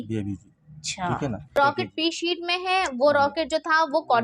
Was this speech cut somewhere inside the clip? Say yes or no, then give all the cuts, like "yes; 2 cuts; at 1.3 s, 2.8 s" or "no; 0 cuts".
yes; 1 cut; at 1.5 s